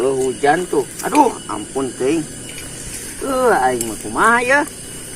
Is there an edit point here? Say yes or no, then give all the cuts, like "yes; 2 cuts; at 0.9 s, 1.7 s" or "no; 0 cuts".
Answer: no; 0 cuts